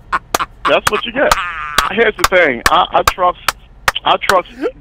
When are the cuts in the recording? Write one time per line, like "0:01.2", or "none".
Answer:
0:01.6